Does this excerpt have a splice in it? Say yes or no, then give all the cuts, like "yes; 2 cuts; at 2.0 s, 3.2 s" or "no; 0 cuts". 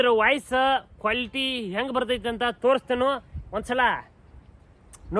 no; 0 cuts